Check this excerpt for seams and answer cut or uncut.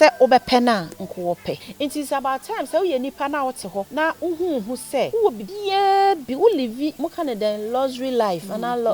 cut